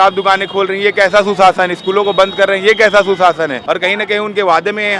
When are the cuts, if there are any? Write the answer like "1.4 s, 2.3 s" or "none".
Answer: 3.6 s